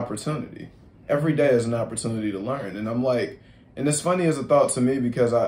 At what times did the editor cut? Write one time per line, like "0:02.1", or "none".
none